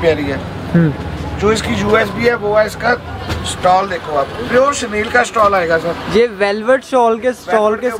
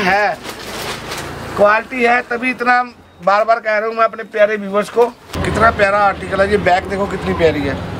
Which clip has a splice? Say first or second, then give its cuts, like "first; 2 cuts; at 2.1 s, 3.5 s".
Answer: second; 1 cut; at 5.3 s